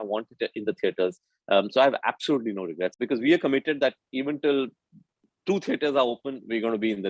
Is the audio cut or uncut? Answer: cut